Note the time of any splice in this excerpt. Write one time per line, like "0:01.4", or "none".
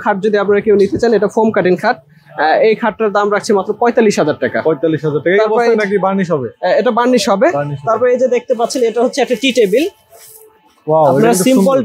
none